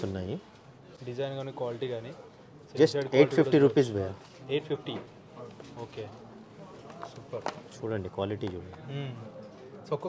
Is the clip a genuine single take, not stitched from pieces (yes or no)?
yes